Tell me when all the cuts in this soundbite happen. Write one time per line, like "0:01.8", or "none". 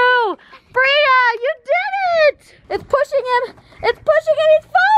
0:02.5